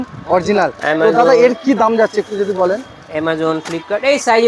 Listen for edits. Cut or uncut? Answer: uncut